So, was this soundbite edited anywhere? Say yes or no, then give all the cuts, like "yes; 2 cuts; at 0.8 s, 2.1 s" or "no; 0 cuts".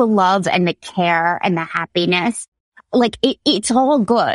yes; 1 cut; at 2.8 s